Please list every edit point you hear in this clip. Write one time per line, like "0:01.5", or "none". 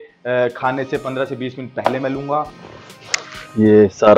0:02.6